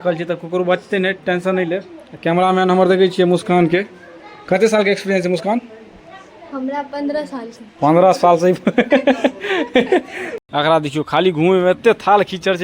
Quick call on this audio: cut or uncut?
cut